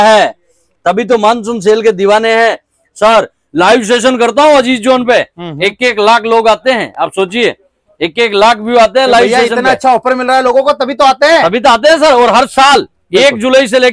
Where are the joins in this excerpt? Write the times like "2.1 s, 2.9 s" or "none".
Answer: none